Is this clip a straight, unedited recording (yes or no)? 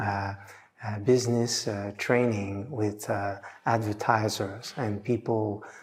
yes